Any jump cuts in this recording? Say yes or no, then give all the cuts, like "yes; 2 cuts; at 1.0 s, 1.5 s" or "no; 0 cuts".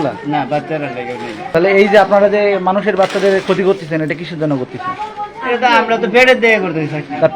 yes; 1 cut; at 1.4 s